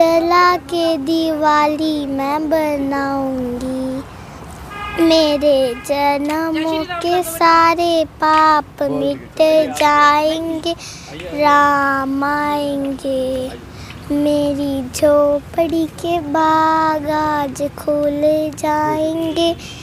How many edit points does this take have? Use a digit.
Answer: 0